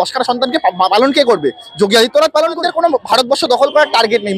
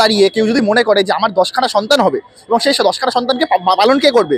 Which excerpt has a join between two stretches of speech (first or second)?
first